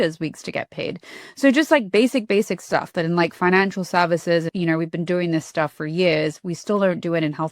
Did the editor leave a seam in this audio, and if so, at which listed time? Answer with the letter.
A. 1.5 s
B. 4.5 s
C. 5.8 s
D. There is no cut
B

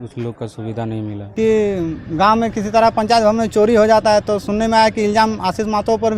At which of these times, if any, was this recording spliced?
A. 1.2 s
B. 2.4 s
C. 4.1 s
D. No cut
A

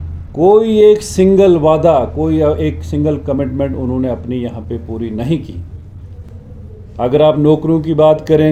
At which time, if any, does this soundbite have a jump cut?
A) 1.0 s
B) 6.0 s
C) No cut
C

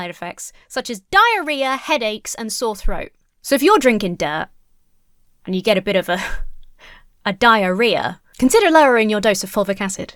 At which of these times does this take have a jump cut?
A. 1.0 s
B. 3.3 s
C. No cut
C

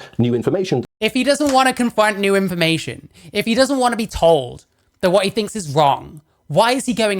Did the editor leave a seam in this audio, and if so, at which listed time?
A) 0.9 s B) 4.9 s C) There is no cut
A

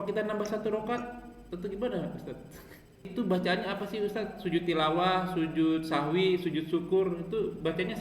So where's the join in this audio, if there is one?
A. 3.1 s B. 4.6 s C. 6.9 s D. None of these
A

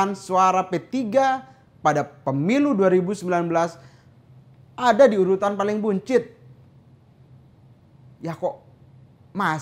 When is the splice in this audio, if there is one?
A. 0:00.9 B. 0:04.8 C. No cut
C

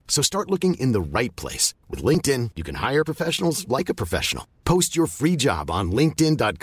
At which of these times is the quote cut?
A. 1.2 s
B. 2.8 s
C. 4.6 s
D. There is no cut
D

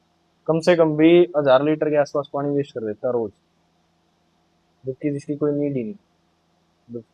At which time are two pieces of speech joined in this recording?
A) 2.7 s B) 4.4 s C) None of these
C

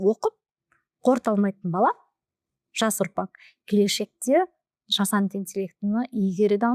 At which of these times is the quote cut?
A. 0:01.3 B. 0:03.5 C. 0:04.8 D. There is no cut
D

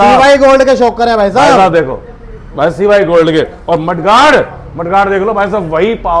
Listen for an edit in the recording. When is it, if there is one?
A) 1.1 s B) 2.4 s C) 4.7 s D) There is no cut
D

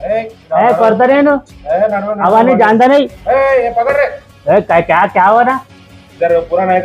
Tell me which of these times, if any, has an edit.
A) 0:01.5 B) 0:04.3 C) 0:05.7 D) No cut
B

